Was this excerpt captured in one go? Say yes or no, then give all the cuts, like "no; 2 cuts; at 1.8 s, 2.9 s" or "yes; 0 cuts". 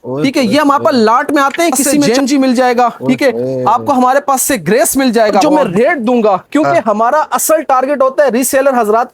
no; 2 cuts; at 2.1 s, 5.4 s